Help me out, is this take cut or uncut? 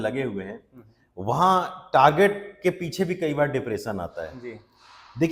uncut